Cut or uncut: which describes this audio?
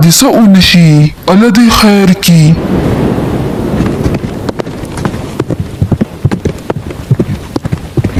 uncut